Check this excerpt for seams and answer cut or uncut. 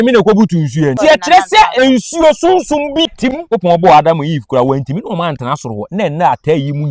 cut